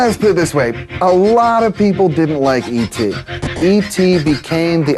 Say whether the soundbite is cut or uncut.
cut